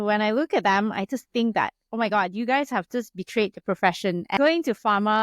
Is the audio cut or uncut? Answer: cut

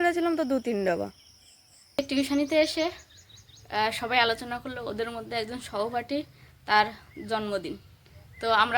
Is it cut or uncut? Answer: cut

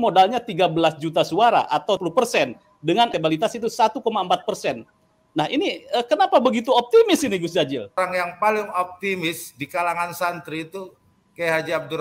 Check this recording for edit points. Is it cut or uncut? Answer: cut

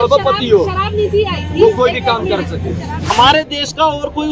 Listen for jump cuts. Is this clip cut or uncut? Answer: cut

